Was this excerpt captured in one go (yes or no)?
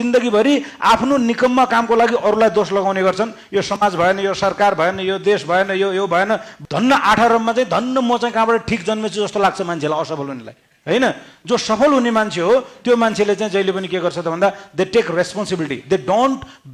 no